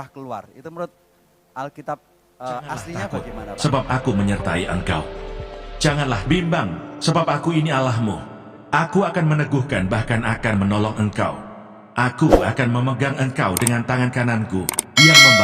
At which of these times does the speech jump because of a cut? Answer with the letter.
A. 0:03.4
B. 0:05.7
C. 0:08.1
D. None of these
A